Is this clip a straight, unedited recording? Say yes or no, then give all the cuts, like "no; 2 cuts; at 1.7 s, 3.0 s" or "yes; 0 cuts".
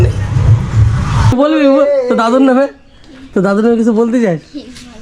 no; 1 cut; at 1.3 s